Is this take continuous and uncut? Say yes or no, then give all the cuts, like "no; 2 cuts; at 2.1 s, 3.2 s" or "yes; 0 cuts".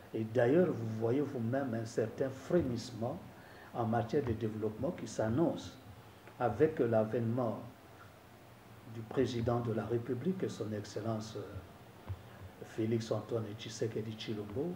yes; 0 cuts